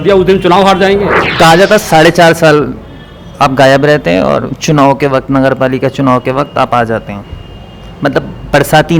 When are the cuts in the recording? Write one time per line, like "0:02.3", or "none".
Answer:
0:01.2